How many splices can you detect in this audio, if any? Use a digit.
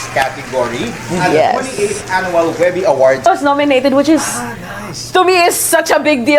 1